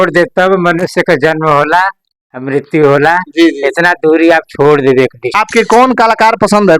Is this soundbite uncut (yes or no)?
no